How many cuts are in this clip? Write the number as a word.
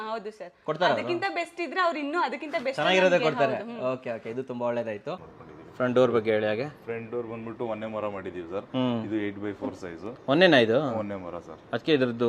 one